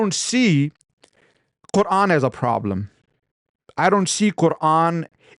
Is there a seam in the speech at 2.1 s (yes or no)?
no